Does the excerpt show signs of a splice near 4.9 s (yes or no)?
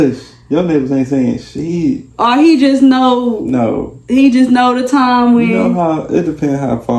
no